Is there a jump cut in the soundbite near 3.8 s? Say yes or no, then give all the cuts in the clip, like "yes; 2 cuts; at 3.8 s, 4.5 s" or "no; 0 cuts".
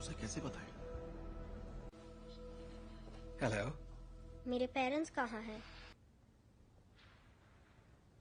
no; 1 cut; at 6.0 s